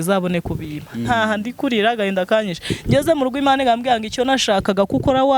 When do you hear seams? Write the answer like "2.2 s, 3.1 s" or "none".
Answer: none